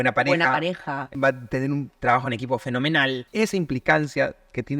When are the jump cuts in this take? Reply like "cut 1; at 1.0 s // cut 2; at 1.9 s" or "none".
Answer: cut 1; at 1.1 s // cut 2; at 3.3 s